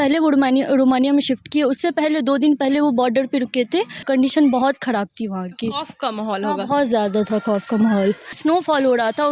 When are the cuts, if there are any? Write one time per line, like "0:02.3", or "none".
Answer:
0:04.0
0:08.3